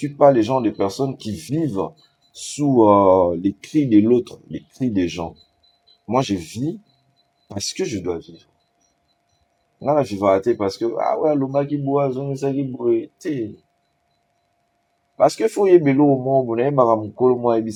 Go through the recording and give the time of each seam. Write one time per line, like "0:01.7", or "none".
none